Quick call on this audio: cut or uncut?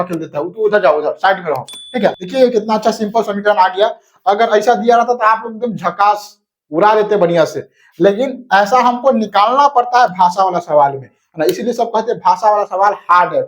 cut